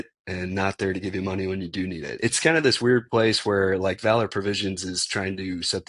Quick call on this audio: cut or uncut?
cut